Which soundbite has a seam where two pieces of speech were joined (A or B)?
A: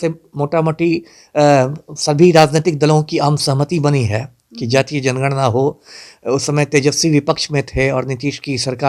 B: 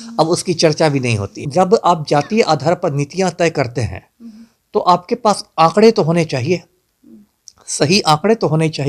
B